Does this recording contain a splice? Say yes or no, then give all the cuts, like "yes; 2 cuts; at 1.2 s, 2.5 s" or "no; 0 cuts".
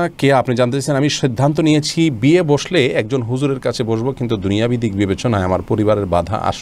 no; 0 cuts